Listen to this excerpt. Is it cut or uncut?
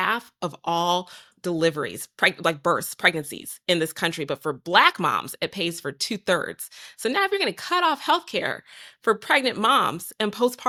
uncut